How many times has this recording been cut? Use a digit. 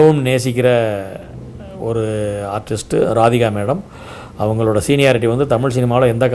0